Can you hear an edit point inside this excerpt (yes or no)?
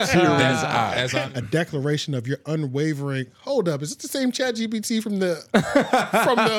yes